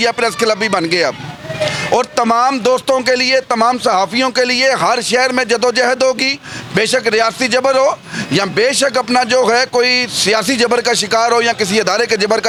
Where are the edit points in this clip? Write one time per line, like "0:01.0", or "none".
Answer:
none